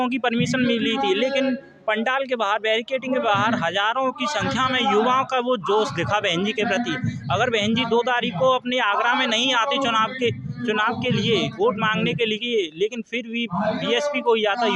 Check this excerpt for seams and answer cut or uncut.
uncut